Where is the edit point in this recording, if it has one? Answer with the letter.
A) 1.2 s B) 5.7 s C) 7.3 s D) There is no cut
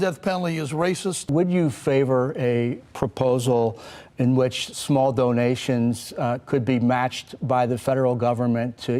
A